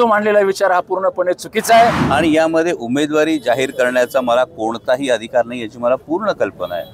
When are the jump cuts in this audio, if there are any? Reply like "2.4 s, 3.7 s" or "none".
2.0 s

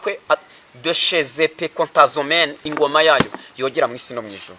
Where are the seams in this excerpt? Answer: 2.7 s

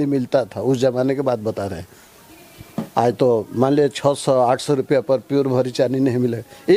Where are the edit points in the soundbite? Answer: none

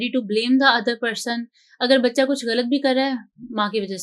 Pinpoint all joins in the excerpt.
none

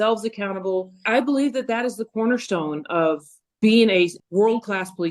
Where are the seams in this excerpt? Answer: 1.0 s, 3.6 s, 4.2 s

